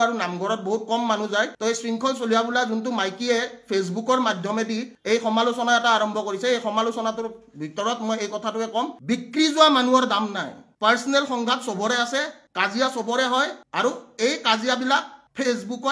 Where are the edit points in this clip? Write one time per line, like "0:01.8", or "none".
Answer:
0:09.0